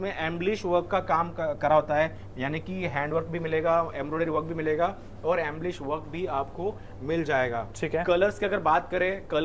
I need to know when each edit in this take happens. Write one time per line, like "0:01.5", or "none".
none